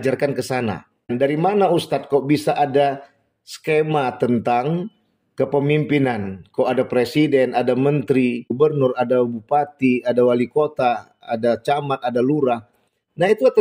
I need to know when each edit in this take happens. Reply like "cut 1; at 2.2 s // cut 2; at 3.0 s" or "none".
cut 1; at 8.5 s